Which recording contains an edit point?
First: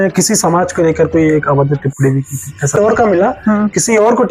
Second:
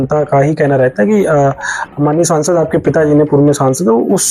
first; 1 cut; at 2.8 s

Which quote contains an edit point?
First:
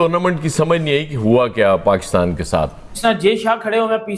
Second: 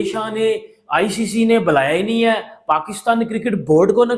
first; 1 cut; at 2.9 s

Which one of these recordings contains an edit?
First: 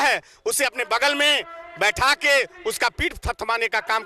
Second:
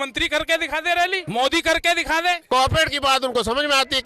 second; 2 cuts; at 1.2 s, 2.4 s

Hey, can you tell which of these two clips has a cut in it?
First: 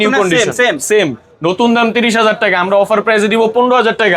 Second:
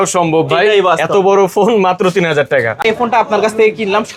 second; 1 cut; at 2.8 s

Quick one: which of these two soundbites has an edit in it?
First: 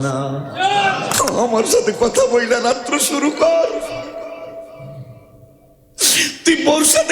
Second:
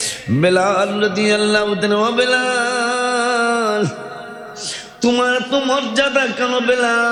first; 1 cut; at 1.1 s

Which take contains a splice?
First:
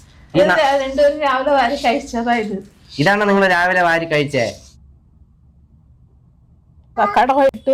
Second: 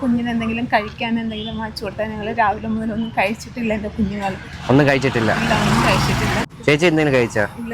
second; 1 cut; at 6.4 s

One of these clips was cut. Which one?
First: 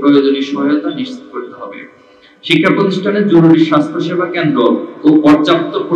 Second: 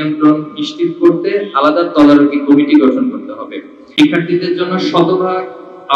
second; 1 cut; at 3.8 s

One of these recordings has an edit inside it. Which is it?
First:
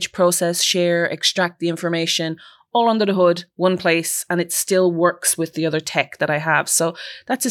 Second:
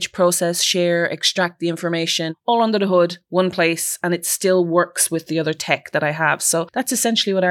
second; 2 cuts; at 2.4 s, 6.7 s

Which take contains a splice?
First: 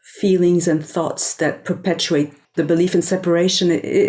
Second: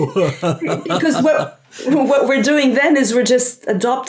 first; 1 cut; at 2.4 s

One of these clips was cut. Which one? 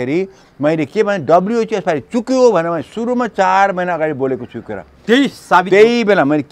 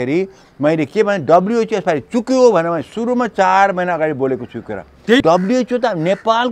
second; 1 cut; at 5.2 s

